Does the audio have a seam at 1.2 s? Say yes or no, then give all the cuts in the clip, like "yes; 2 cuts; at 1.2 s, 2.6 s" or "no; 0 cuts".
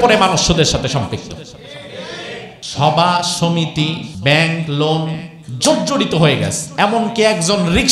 no; 2 cuts; at 2.6 s, 4.1 s